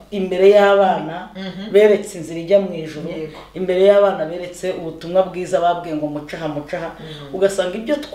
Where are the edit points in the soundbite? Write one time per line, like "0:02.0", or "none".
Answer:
none

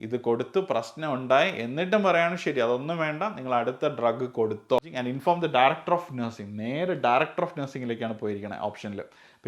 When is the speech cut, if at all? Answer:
0:04.8

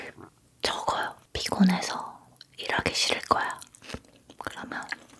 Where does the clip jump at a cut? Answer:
0:01.3

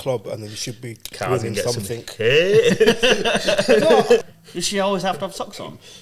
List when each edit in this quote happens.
0:04.2

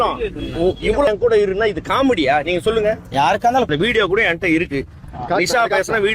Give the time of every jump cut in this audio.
0:01.1
0:03.7

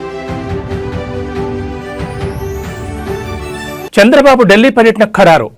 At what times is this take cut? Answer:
0:03.2

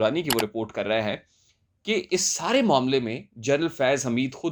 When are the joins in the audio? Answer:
none

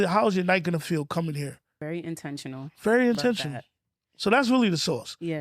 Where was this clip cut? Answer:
0:01.8

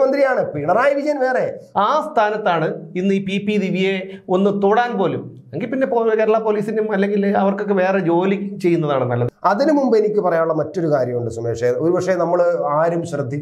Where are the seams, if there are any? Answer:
0:01.6
0:09.2

